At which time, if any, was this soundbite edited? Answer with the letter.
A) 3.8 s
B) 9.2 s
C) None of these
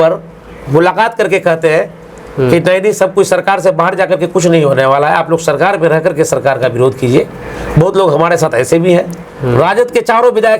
B